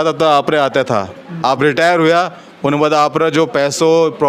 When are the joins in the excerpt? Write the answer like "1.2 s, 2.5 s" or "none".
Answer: none